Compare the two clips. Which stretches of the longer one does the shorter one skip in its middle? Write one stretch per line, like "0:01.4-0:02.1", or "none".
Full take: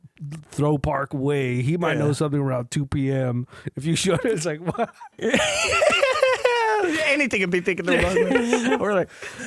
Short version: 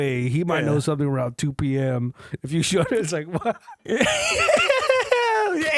none